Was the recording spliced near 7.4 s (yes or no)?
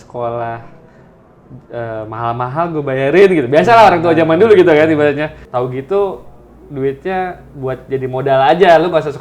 no